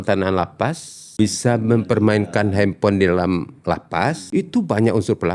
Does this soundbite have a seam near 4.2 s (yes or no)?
yes